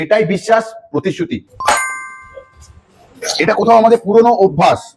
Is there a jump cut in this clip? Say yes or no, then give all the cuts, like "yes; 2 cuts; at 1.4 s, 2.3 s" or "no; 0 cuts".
yes; 1 cut; at 1.5 s